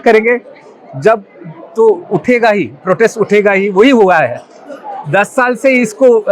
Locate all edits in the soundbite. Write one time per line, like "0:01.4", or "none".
none